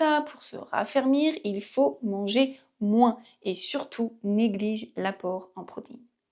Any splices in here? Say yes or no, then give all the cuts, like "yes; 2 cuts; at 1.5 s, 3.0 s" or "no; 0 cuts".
no; 0 cuts